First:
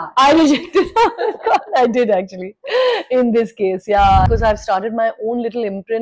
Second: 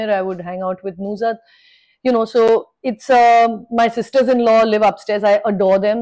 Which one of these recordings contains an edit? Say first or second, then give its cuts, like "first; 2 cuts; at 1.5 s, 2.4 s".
first; 1 cut; at 4.3 s